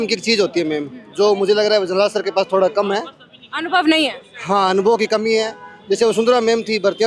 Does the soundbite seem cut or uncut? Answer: uncut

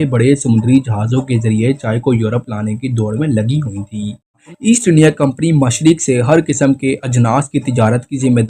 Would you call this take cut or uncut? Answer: cut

